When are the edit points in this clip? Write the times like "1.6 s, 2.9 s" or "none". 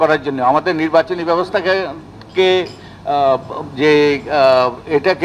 none

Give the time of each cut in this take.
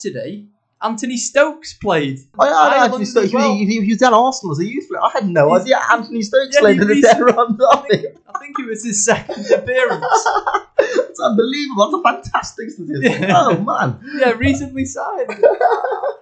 2.2 s

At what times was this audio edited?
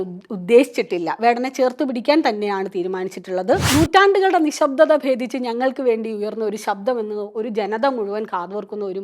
3.6 s

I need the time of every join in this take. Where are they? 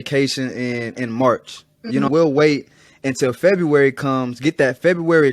2.1 s

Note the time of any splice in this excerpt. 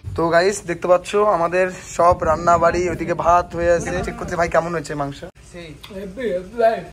4.1 s, 5.3 s

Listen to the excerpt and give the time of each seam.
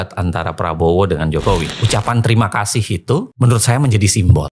1.7 s

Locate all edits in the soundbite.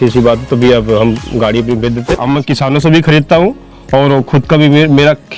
2.1 s

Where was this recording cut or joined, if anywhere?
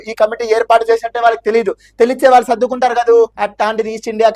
3.4 s

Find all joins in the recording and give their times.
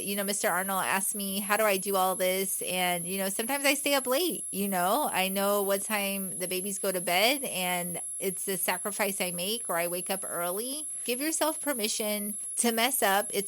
11.0 s, 12.4 s

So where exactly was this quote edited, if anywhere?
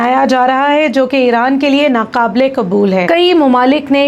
3.0 s

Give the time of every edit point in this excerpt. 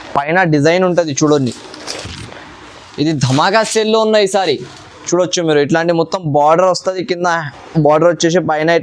none

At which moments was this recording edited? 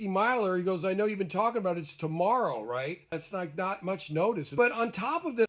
none

